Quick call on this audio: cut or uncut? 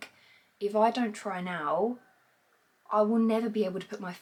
uncut